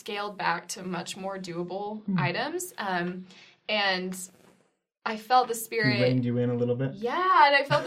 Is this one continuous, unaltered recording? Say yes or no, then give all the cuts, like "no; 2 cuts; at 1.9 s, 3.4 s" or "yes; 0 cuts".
yes; 0 cuts